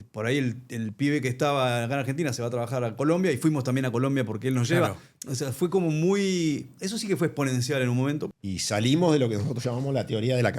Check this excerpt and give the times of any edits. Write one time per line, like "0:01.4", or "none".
0:08.3